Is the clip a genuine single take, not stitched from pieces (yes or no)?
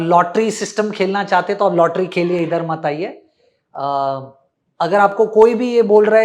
yes